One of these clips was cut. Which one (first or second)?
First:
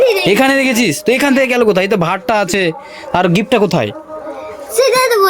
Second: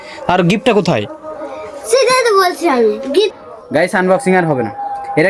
second